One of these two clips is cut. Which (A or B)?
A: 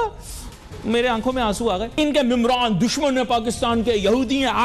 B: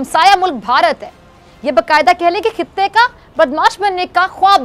A